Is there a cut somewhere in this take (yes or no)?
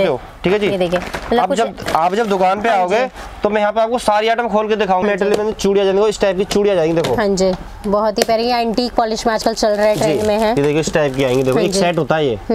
yes